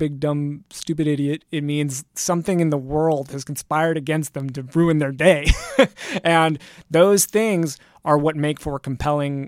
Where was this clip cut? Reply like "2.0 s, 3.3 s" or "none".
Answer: none